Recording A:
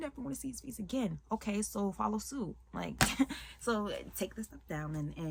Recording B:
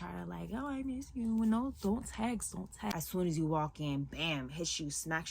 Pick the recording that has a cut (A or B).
B